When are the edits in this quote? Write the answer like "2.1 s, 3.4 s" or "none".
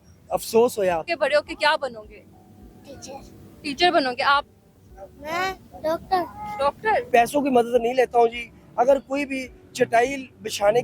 1.1 s, 7.1 s